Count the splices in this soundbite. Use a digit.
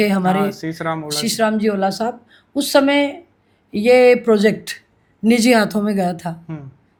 0